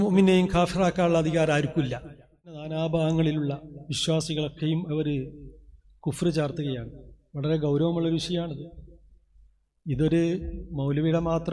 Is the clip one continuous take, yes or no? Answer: no